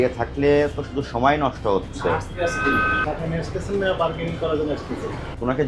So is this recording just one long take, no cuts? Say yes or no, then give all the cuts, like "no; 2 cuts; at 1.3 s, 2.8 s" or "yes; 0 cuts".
yes; 0 cuts